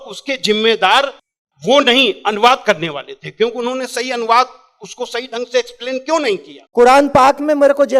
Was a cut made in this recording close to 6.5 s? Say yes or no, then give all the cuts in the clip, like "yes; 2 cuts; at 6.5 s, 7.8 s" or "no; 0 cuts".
yes; 1 cut; at 6.5 s